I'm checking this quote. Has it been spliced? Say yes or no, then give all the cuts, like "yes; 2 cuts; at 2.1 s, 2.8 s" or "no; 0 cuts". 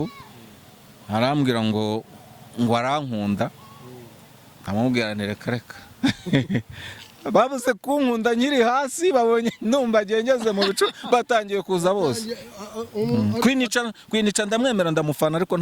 no; 0 cuts